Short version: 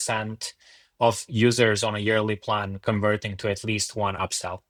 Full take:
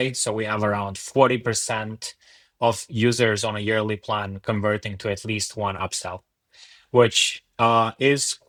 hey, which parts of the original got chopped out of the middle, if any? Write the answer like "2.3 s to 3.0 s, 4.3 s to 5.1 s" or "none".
none